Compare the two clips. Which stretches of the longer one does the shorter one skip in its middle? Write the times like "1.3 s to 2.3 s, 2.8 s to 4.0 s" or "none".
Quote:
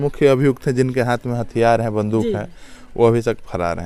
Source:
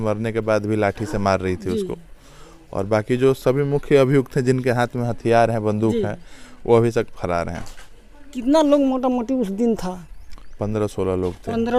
none

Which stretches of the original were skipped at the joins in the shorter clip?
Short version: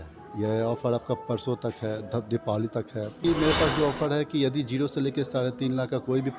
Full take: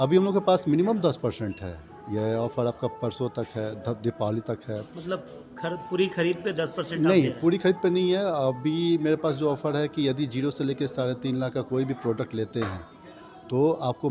5.0 s to 8.9 s

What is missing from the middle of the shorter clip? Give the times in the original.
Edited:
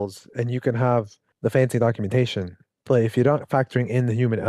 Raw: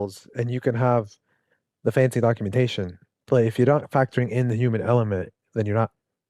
1.2 s to 1.6 s

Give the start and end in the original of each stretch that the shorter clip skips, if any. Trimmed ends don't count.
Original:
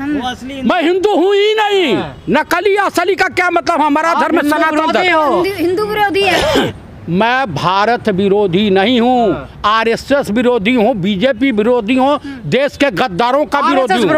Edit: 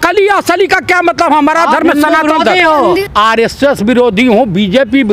5.5 s to 9.5 s

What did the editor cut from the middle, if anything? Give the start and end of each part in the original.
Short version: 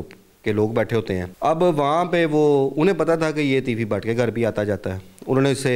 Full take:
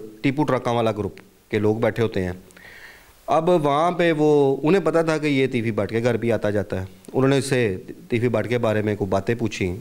2.4 s to 3.2 s

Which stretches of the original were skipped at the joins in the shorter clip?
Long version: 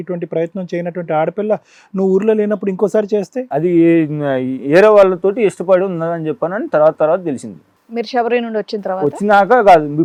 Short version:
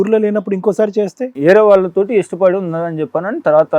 3.4 s to 4.5 s

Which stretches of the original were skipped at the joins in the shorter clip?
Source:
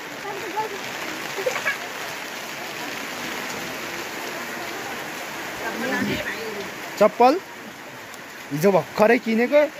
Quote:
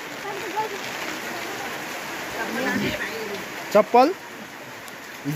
1.2 s to 4.5 s

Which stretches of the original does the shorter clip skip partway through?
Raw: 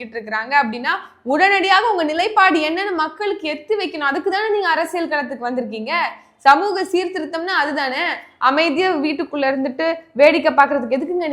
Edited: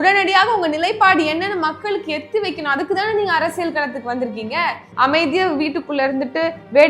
6.2 s to 8.3 s

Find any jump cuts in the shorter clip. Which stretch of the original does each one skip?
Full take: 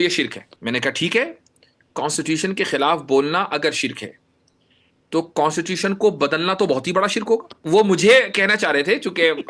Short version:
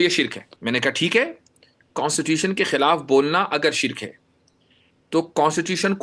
none

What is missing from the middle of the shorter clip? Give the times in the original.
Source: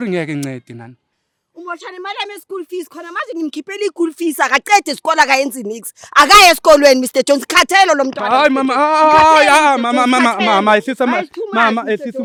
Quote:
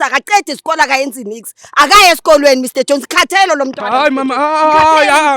none

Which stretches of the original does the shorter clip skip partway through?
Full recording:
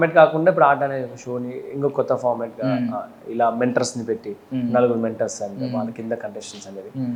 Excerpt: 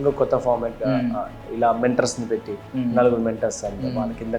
none

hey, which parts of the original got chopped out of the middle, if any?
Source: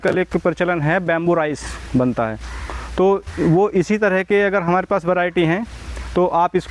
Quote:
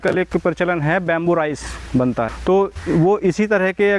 2.3 s to 2.9 s

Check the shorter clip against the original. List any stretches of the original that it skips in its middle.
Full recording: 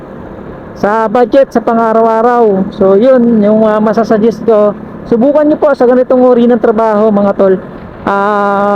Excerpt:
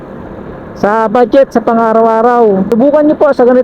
2.7 s to 5.1 s

